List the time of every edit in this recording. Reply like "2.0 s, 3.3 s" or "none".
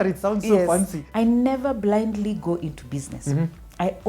1.0 s